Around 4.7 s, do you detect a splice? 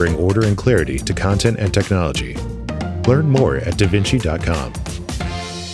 yes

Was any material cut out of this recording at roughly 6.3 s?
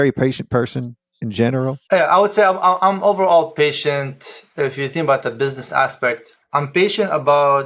yes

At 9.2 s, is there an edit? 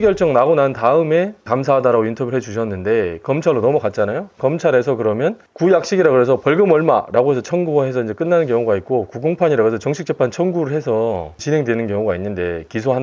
no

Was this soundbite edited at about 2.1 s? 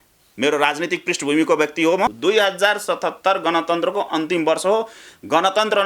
yes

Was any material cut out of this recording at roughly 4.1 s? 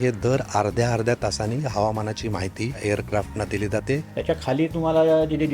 yes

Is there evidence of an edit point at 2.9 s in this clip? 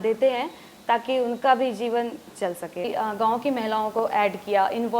yes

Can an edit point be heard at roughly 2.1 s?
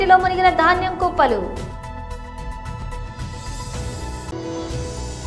no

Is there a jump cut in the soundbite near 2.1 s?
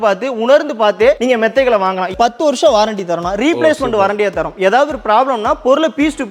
yes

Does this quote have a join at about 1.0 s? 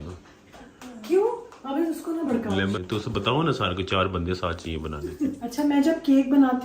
no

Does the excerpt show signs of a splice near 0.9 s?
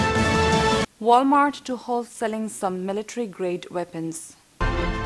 yes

